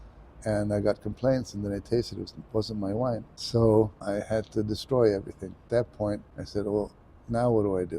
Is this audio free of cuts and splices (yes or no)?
no